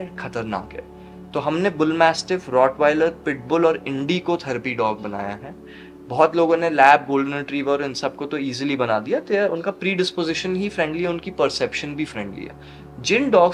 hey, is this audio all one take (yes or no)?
yes